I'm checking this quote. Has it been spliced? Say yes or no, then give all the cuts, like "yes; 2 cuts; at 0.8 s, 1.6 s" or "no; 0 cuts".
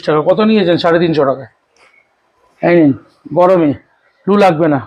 no; 0 cuts